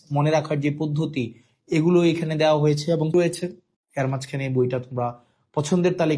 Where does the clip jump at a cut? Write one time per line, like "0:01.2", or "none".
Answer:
0:03.1